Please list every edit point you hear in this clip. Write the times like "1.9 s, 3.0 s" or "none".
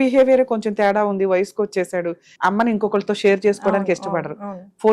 2.3 s